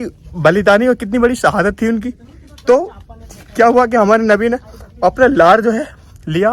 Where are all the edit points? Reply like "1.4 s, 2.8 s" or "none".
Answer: none